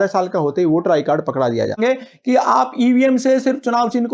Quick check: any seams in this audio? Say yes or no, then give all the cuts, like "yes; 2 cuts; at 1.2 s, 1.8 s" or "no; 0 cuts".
yes; 1 cut; at 1.8 s